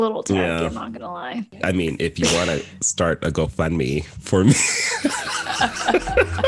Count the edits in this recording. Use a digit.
1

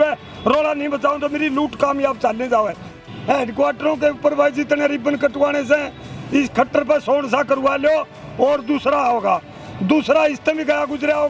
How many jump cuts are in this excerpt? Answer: 1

